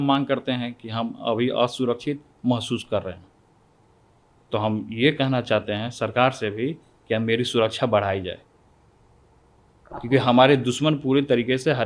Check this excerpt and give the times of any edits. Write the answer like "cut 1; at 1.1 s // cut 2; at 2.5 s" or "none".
none

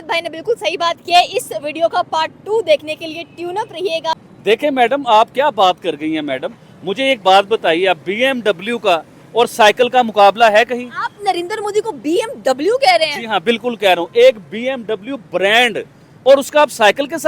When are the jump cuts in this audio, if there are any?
cut 1; at 4.2 s

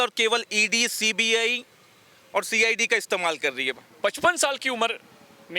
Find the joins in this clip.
cut 1; at 3.8 s

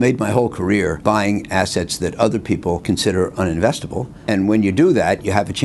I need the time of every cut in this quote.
cut 1; at 1.0 s // cut 2; at 2.8 s // cut 3; at 4.1 s

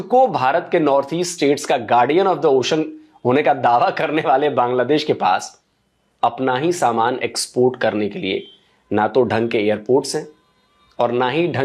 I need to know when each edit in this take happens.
none

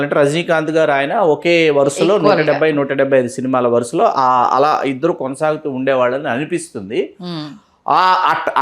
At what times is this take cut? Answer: none

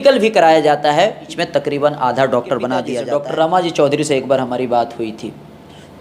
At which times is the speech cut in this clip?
cut 1; at 1.3 s // cut 2; at 3.0 s

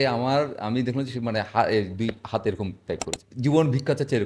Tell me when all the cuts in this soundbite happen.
cut 1; at 3.2 s

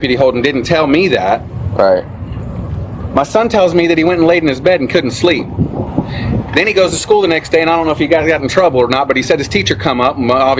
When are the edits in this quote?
none

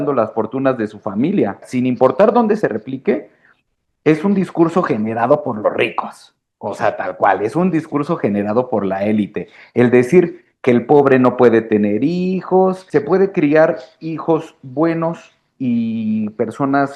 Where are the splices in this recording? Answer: cut 1; at 1.7 s // cut 2; at 12.8 s

